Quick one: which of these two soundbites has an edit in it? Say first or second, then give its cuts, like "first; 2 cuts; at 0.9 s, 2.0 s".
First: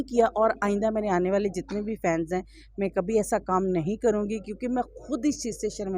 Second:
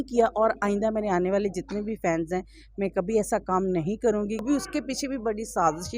second; 1 cut; at 4.4 s